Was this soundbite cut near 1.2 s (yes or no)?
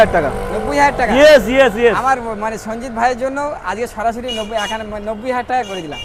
no